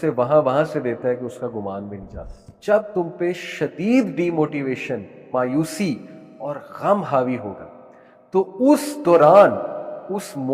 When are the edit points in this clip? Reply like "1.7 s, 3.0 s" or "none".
2.5 s